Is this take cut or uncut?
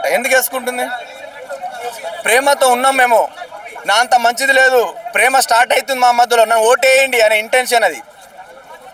uncut